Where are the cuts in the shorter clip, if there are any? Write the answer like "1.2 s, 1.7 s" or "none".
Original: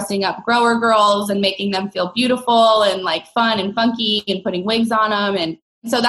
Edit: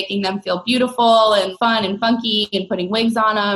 1.5 s